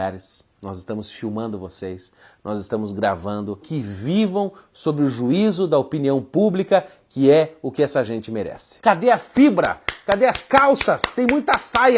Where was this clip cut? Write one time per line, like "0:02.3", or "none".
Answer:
0:03.7
0:08.8